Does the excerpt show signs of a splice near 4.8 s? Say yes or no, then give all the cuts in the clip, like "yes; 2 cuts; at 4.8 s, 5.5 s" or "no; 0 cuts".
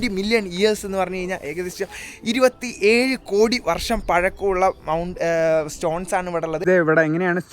no; 1 cut; at 6.6 s